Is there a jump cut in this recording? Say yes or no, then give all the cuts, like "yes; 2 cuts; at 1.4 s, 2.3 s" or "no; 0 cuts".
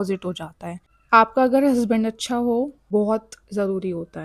no; 0 cuts